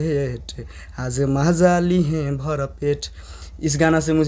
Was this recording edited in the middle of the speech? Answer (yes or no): no